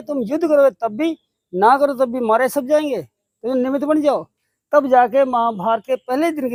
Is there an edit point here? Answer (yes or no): no